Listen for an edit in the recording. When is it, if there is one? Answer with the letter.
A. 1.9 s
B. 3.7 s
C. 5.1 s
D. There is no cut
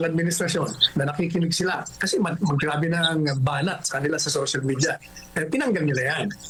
D